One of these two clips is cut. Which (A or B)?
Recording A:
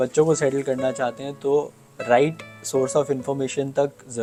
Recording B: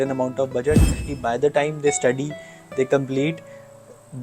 B